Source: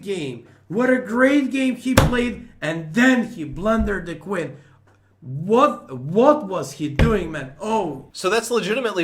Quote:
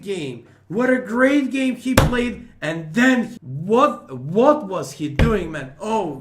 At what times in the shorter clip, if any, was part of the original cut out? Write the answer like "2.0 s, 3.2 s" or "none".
3.4 s